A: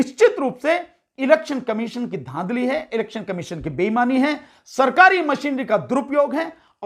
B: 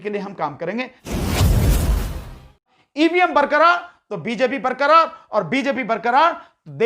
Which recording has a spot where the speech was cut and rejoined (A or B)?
B